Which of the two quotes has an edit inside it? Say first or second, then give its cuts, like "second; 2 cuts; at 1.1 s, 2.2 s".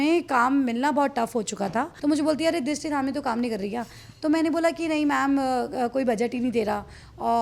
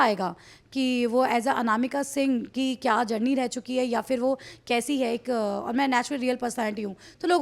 first; 1 cut; at 1.9 s